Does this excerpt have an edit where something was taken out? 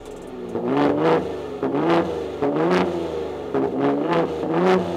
no; 0 cuts

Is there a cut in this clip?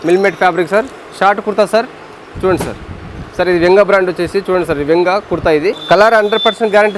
yes; 2 cuts; at 0.9 s, 5.8 s

